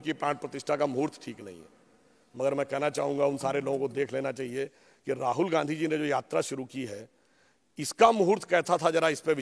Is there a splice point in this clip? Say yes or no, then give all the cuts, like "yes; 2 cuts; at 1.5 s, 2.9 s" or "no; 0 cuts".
no; 0 cuts